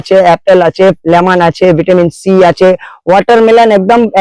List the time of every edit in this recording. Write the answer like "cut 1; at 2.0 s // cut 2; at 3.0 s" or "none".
none